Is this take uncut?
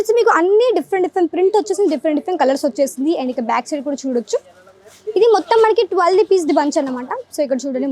yes; 0 cuts

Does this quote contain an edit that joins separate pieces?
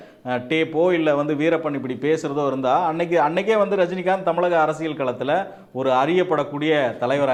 no; 0 cuts

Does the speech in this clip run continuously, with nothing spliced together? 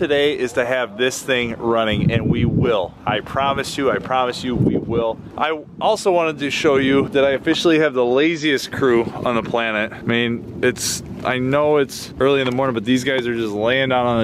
no; 1 cut; at 5.2 s

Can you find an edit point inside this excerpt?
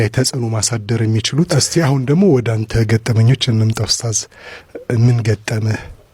yes; 1 cut; at 1.5 s

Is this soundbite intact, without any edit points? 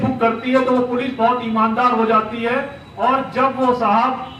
yes; 0 cuts

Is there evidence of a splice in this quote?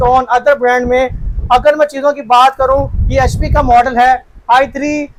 no; 0 cuts

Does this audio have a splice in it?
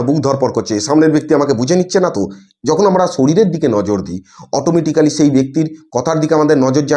no; 0 cuts

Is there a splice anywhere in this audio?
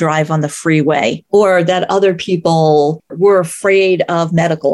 yes; 2 cuts; at 1.2 s, 3.1 s

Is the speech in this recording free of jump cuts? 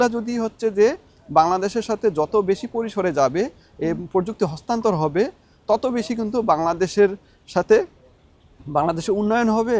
yes; 0 cuts

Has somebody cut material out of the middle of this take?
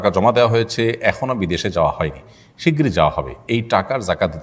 no; 0 cuts

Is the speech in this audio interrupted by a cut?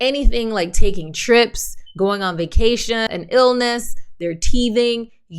yes; 1 cut; at 3.1 s

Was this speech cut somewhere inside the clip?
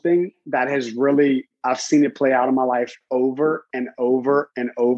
no; 0 cuts

